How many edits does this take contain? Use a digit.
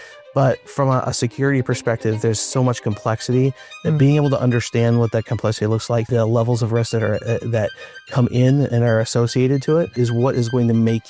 2